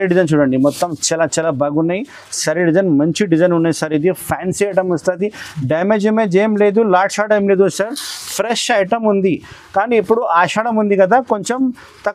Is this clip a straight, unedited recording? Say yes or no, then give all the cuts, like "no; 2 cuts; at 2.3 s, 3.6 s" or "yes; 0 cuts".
yes; 0 cuts